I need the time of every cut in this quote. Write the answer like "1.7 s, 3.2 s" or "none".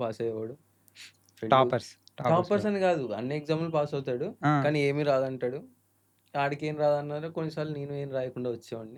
none